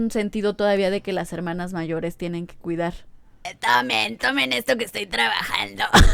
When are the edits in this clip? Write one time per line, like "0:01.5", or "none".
0:03.5